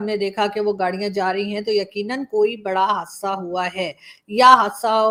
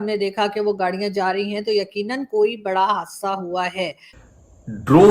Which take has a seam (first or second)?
second